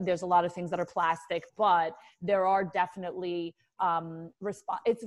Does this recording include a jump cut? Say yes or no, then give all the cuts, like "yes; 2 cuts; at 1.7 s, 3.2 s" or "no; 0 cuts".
no; 0 cuts